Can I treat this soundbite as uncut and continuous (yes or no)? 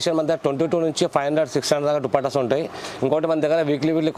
yes